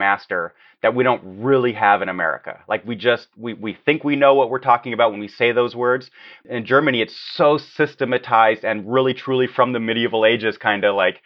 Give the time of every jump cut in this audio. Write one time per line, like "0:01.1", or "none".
0:06.4